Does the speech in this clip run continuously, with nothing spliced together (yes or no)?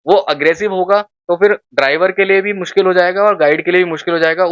yes